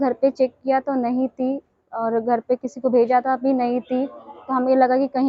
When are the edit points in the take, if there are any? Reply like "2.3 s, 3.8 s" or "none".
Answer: none